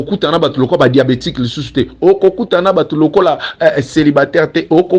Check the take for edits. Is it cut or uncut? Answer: uncut